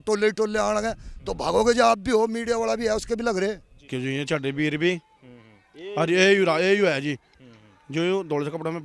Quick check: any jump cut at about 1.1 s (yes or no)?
no